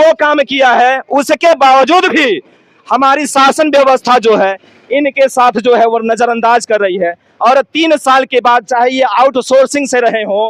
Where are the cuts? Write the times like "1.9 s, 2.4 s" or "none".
none